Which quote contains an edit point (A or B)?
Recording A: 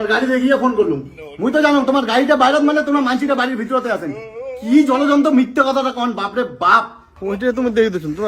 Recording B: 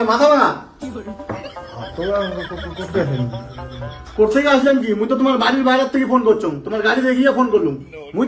A